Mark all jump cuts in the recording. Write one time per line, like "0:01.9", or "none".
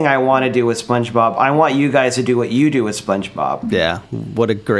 none